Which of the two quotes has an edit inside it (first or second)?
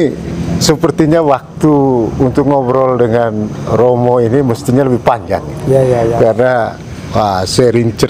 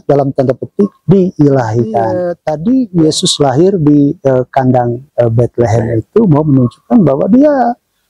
second